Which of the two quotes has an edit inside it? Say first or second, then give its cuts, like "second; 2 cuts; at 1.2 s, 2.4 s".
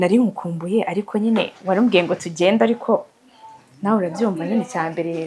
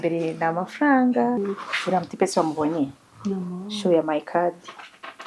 second; 1 cut; at 1.5 s